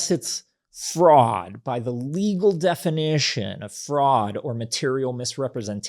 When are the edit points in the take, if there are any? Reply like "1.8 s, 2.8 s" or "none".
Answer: none